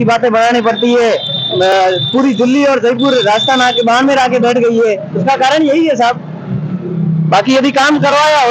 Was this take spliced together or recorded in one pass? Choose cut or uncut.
uncut